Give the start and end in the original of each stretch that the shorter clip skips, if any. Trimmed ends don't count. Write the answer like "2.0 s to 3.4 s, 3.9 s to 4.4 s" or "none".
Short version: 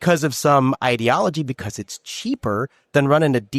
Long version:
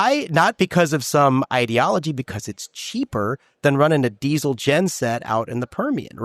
none